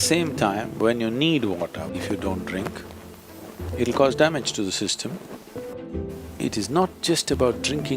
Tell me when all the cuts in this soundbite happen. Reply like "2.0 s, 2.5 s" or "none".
1.9 s, 5.8 s